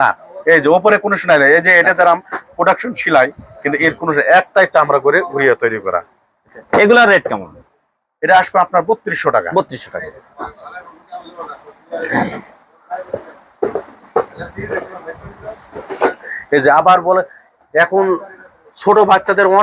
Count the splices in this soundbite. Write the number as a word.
zero